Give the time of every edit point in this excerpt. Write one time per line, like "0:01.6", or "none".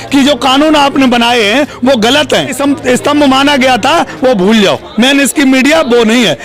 0:02.6